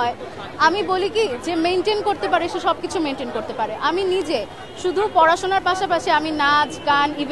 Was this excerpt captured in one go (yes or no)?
yes